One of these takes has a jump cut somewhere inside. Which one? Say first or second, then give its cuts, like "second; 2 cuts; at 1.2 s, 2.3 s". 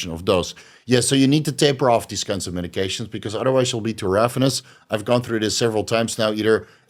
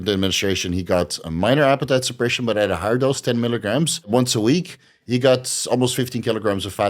second; 1 cut; at 4.1 s